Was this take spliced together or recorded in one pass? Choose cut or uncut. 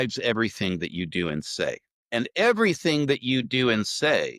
cut